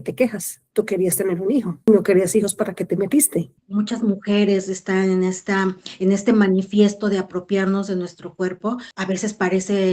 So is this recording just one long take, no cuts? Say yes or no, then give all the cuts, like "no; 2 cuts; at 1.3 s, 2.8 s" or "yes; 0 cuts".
no; 3 cuts; at 1.9 s, 3.6 s, 8.9 s